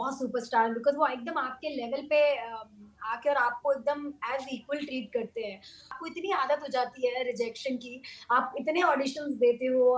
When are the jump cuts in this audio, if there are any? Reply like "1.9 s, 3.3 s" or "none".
6.0 s